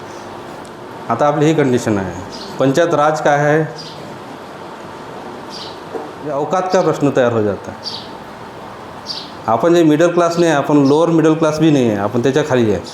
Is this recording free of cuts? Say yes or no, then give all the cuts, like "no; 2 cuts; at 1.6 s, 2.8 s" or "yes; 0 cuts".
no; 2 cuts; at 1.2 s, 6.3 s